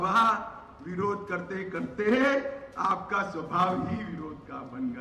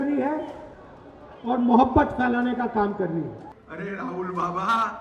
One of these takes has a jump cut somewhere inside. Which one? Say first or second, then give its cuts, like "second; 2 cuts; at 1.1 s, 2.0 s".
second; 1 cut; at 3.5 s